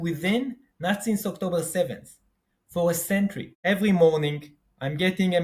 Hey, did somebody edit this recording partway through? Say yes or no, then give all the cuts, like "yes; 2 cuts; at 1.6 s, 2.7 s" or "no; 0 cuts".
yes; 1 cut; at 3.5 s